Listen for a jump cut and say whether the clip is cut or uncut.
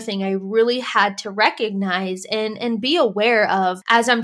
uncut